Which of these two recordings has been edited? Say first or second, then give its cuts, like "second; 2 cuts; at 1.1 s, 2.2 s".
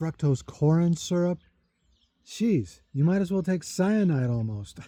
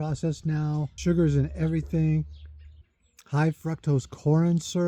second; 1 cut; at 0.9 s